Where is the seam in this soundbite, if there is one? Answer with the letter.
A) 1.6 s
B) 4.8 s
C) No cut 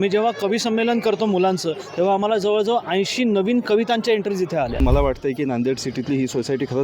B